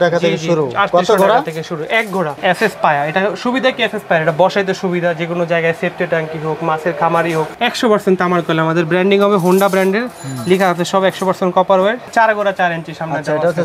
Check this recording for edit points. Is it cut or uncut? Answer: cut